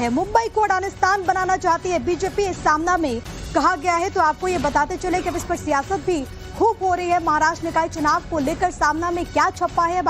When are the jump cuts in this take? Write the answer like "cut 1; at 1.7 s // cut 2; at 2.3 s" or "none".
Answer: cut 1; at 5.0 s